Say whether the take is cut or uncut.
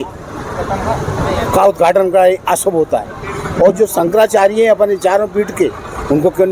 uncut